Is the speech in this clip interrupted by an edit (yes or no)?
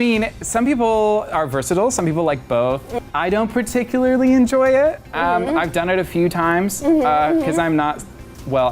yes